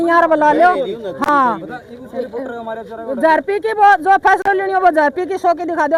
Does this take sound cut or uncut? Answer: uncut